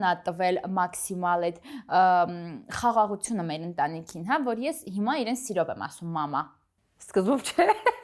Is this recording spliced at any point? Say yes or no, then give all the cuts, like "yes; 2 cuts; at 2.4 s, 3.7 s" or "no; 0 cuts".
no; 0 cuts